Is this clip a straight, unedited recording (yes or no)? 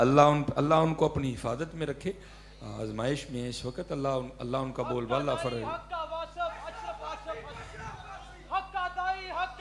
yes